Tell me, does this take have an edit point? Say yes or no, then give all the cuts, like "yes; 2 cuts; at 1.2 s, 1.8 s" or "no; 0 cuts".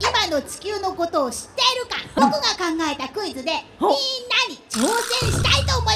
no; 0 cuts